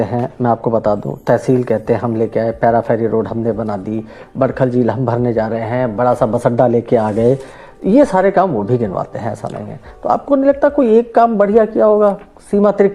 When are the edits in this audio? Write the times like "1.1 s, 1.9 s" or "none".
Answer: none